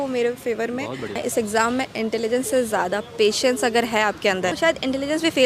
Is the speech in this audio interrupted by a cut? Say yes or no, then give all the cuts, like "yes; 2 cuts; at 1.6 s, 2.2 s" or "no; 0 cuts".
yes; 2 cuts; at 1.2 s, 4.5 s